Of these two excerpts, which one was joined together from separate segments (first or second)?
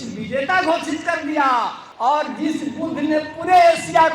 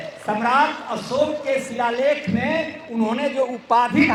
first